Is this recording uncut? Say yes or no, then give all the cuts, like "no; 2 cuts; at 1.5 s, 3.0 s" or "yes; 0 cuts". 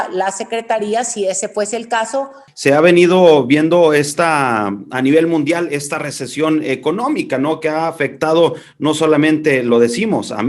no; 1 cut; at 2.4 s